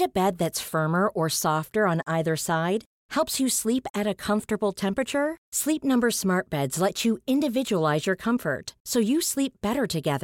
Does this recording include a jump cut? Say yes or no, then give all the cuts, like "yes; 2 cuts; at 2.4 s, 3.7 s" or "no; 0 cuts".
no; 0 cuts